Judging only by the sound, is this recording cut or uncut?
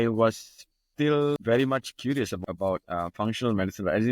cut